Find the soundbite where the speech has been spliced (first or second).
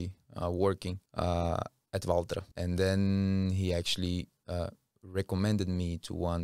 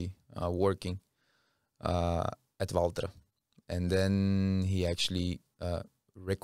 first